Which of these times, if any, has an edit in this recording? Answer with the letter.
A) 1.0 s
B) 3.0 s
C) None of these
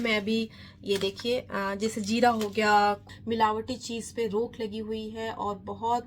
B